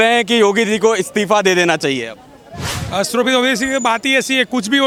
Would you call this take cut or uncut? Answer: uncut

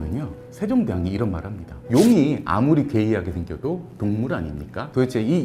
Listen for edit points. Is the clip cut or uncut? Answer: uncut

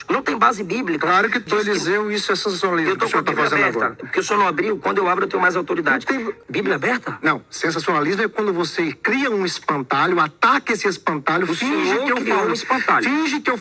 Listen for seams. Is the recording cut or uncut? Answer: cut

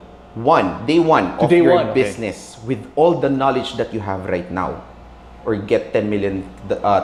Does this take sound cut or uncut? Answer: uncut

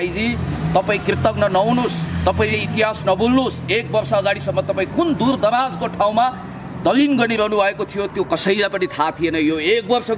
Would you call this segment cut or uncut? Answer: uncut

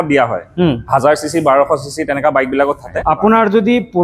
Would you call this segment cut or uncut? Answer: cut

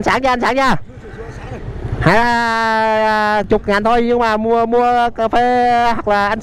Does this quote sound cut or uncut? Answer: cut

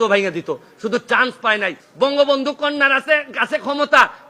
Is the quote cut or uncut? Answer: cut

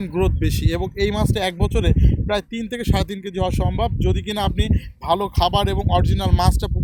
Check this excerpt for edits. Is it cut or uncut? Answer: uncut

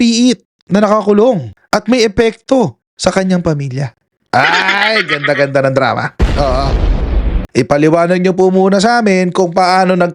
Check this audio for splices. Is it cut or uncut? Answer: cut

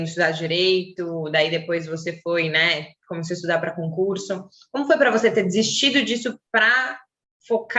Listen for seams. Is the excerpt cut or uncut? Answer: uncut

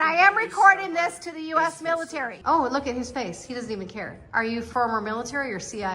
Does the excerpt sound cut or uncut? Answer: cut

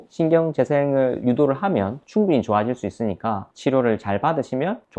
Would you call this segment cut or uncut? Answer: cut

